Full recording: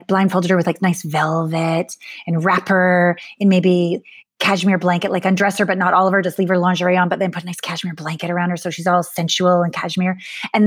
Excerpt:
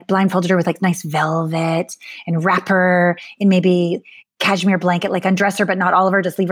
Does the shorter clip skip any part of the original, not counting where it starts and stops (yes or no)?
no